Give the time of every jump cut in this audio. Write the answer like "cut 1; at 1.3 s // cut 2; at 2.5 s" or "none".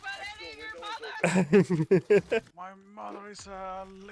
none